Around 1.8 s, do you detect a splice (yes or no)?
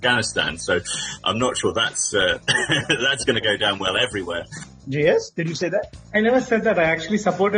no